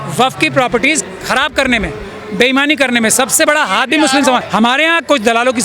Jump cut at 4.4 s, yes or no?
yes